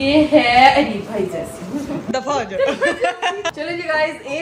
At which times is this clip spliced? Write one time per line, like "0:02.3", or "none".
none